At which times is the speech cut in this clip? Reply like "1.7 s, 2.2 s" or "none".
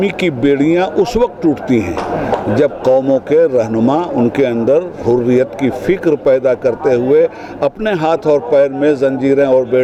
none